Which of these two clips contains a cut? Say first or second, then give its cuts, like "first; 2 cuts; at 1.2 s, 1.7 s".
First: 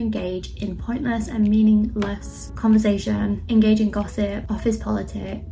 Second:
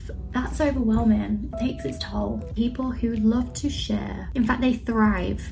second; 2 cuts; at 2.5 s, 4.2 s